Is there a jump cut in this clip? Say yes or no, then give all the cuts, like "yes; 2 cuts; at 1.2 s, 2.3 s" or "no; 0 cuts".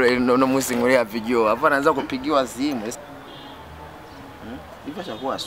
yes; 1 cut; at 2.9 s